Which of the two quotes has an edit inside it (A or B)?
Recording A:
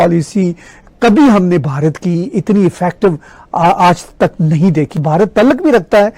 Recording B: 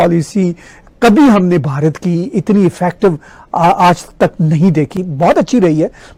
A